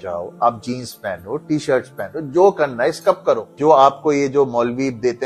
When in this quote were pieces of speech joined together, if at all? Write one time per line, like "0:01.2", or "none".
0:03.5

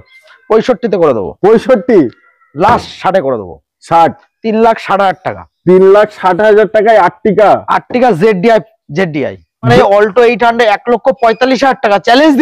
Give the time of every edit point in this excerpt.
0:09.7

